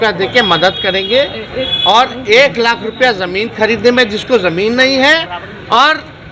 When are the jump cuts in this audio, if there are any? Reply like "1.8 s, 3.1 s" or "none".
none